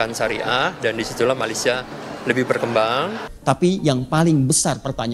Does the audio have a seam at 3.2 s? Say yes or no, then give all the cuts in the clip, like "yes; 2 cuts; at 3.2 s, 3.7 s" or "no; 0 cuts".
yes; 1 cut; at 3.2 s